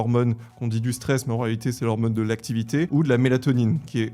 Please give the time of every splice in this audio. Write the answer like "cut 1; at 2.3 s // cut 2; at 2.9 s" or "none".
cut 1; at 2.9 s